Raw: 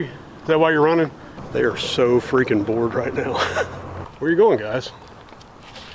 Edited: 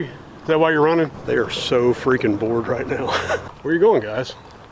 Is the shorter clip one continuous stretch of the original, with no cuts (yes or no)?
no